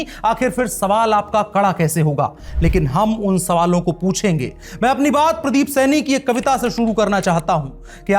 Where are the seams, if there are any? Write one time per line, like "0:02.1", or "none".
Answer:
none